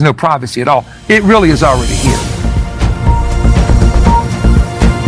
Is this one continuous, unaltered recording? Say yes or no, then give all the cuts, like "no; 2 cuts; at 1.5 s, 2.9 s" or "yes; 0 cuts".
no; 1 cut; at 1.8 s